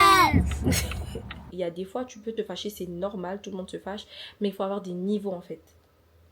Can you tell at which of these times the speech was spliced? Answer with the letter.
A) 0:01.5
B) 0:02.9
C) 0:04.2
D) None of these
A